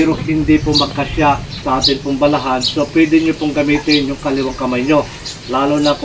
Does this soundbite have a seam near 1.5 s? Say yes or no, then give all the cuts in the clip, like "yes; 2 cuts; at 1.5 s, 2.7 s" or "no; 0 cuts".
yes; 1 cut; at 1.5 s